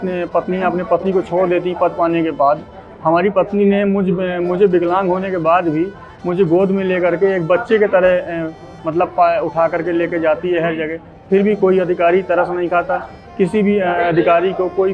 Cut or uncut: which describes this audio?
uncut